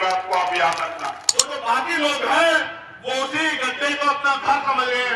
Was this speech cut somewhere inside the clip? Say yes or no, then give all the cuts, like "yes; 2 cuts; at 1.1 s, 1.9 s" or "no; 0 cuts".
yes; 1 cut; at 1.4 s